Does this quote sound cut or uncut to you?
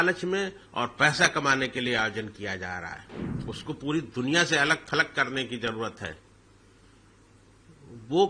cut